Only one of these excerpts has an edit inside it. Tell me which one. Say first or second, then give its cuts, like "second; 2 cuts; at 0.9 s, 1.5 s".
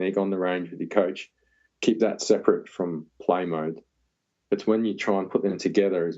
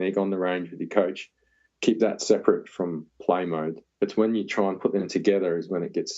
second; 1 cut; at 3.8 s